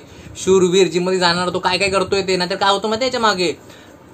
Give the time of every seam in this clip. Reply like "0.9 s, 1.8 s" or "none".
none